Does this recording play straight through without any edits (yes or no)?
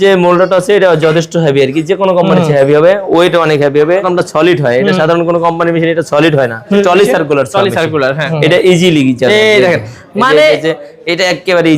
no